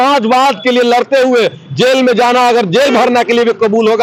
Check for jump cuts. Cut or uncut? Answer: uncut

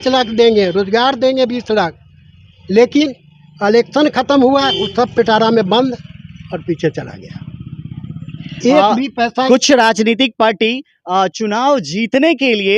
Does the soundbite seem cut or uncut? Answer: uncut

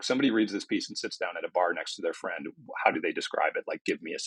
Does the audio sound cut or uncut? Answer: uncut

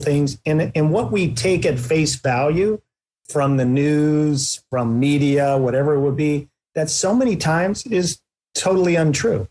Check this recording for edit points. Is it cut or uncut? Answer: uncut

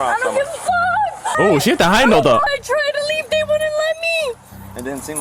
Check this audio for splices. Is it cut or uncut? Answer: cut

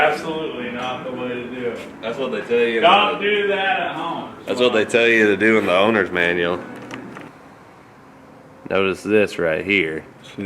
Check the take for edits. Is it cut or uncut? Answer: cut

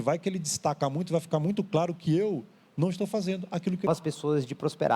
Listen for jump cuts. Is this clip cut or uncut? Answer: cut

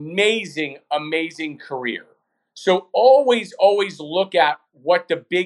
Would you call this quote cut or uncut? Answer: uncut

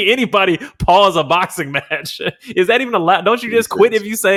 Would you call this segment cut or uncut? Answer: uncut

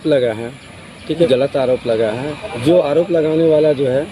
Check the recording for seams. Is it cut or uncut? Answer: cut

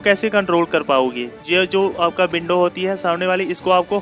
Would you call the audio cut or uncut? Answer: cut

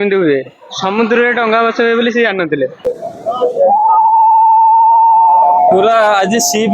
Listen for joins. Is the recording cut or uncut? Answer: cut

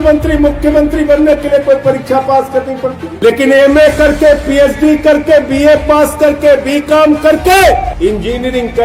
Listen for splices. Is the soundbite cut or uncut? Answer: cut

